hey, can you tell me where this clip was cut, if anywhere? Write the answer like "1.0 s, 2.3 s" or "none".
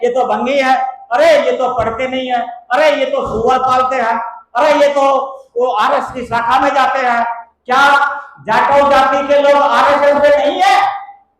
7.5 s

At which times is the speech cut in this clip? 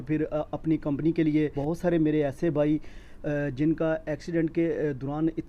1.6 s

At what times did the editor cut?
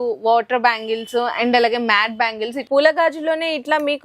2.6 s

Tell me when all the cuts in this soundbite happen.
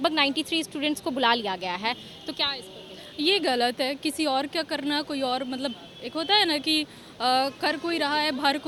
none

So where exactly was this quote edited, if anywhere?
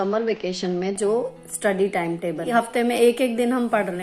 2.4 s

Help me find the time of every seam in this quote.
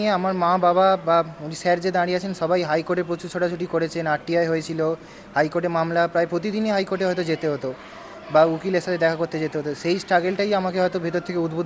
none

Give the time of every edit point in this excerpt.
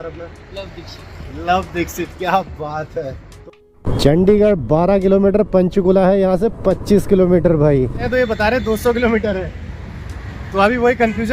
3.6 s, 8.1 s

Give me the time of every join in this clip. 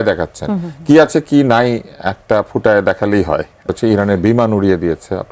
3.7 s

